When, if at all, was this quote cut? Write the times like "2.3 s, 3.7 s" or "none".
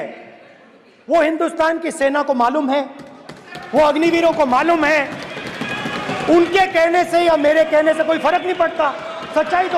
none